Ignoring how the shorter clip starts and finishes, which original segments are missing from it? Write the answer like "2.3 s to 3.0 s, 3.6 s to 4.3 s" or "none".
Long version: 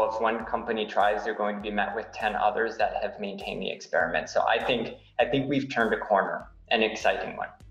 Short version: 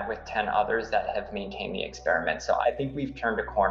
4.5 s to 5.2 s